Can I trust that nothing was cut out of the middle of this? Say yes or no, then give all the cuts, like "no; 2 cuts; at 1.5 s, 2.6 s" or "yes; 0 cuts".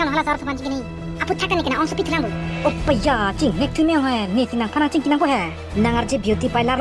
yes; 0 cuts